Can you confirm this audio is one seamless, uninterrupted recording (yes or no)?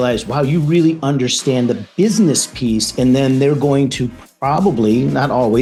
yes